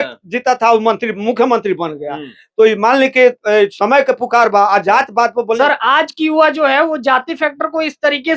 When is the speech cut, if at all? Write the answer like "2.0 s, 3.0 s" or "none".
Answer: 5.6 s